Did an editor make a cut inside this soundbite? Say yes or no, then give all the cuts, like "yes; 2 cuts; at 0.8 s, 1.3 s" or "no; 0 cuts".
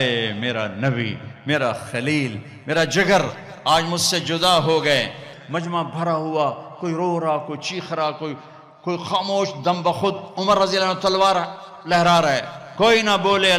yes; 1 cut; at 5.3 s